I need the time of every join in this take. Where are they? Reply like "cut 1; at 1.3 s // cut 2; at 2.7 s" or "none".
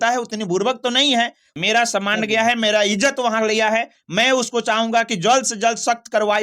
cut 1; at 1.5 s